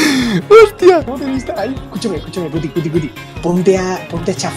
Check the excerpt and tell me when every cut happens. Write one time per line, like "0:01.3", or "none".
0:01.1